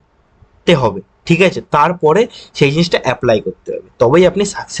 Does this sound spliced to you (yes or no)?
no